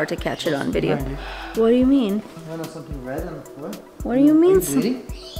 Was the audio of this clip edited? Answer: no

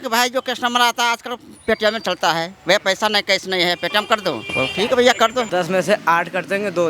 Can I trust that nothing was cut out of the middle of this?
no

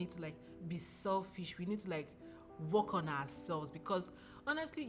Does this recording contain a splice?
no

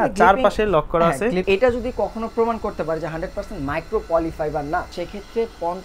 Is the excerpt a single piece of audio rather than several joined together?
no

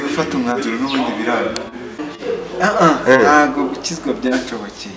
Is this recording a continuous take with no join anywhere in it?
no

